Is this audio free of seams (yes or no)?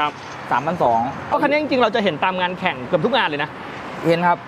no